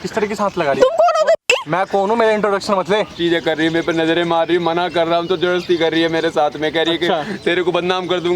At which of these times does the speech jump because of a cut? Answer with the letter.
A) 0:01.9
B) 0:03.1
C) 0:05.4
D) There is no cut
B